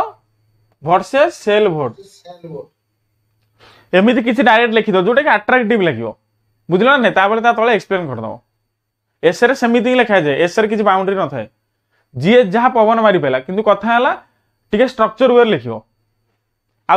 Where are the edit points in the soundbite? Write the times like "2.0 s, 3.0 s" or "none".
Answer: none